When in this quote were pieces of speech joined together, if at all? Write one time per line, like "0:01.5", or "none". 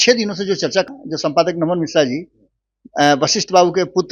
0:01.0